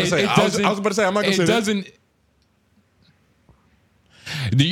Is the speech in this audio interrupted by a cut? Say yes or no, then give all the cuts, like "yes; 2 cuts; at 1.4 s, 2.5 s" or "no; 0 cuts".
no; 0 cuts